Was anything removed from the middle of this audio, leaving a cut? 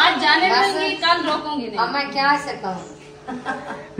no; 0 cuts

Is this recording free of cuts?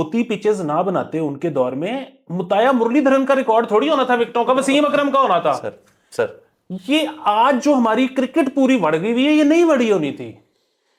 yes; 0 cuts

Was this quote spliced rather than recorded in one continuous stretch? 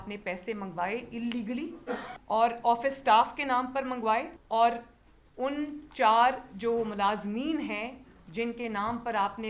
yes; 2 cuts; at 2.1 s, 4.4 s

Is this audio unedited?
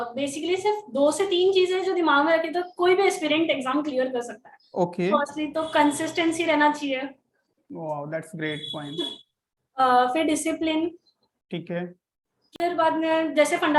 no; 1 cut; at 12.6 s

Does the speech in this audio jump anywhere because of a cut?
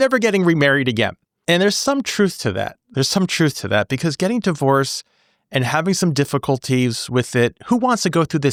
no; 0 cuts

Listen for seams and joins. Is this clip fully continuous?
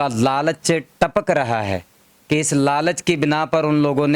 yes; 0 cuts

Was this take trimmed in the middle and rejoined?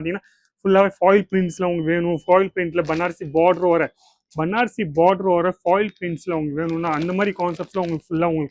no; 0 cuts

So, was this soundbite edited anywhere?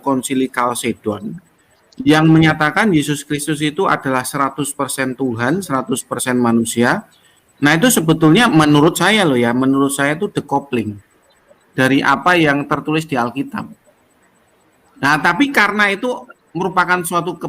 no; 0 cuts

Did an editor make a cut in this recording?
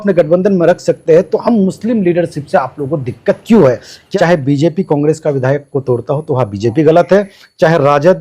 yes; 1 cut; at 3.9 s

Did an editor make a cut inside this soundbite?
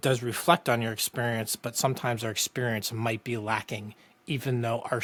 no; 0 cuts

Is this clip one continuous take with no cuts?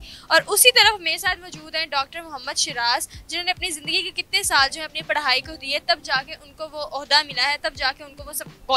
yes; 0 cuts

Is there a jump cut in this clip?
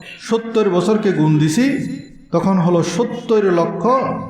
no; 0 cuts

